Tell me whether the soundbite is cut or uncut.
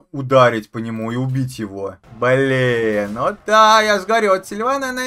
cut